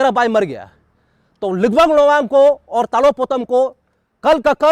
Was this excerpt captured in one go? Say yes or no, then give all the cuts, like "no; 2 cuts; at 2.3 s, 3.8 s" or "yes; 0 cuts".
yes; 0 cuts